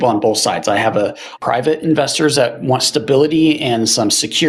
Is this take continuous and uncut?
yes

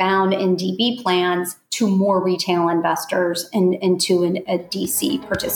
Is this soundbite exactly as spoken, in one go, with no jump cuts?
yes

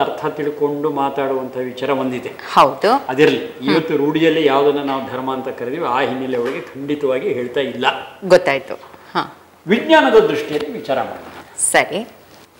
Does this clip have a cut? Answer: no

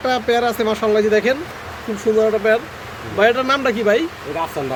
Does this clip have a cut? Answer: no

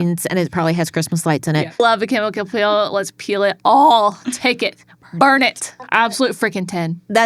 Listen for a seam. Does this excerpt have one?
yes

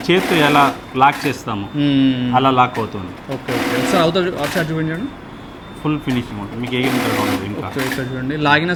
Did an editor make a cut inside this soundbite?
no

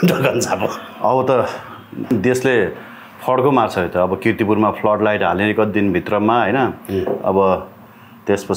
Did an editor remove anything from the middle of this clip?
no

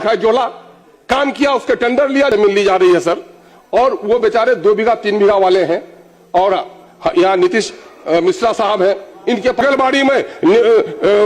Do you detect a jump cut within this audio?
yes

